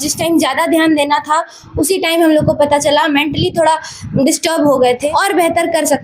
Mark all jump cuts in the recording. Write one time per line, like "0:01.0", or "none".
0:05.0